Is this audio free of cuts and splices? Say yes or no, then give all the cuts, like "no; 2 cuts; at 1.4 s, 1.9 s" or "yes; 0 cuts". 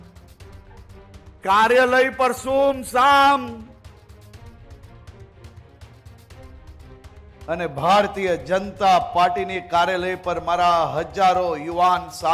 yes; 0 cuts